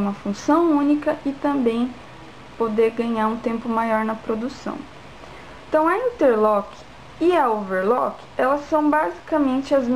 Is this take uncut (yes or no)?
yes